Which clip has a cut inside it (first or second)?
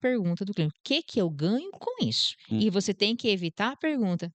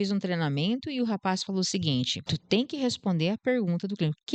second